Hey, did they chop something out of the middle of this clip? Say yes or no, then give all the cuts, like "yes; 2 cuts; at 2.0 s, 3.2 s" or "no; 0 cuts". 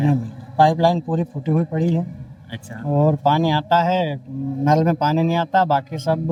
no; 0 cuts